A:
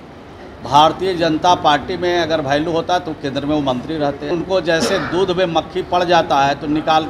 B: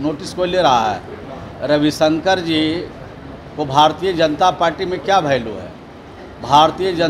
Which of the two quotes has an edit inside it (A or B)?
A